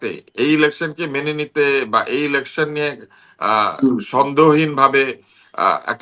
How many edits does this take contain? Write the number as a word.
zero